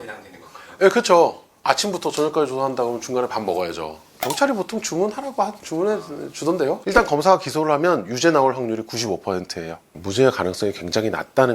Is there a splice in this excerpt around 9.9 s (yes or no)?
yes